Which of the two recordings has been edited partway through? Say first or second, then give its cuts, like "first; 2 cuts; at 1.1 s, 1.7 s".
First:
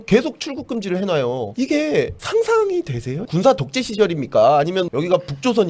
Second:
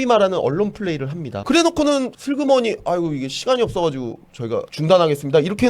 second; 1 cut; at 2.1 s